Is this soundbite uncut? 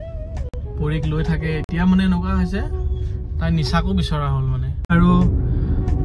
no; 1 cut; at 4.9 s

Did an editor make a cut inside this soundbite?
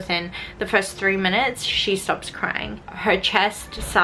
no; 0 cuts

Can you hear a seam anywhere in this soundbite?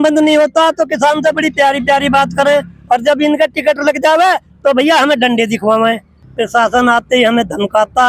yes; 1 cut; at 6.1 s

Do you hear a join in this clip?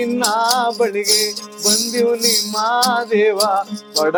no; 0 cuts

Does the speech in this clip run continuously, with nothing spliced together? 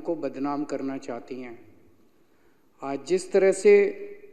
yes; 0 cuts

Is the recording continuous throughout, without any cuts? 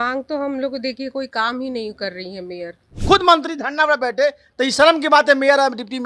no; 1 cut; at 2.9 s

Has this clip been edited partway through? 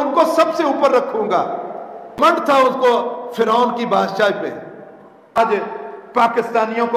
yes; 2 cuts; at 2.3 s, 5.4 s

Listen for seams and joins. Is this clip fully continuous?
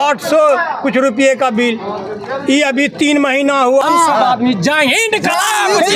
no; 1 cut; at 3.8 s

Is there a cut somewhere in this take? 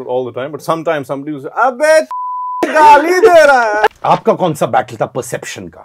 yes; 1 cut; at 3.9 s

